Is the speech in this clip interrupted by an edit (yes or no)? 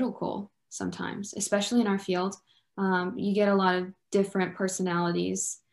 no